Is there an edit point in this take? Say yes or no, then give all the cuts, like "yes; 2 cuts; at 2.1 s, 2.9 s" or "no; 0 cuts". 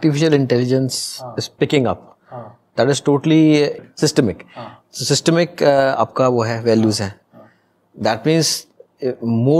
yes; 1 cut; at 3.8 s